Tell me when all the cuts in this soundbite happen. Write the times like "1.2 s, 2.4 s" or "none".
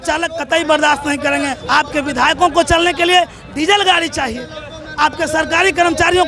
1.6 s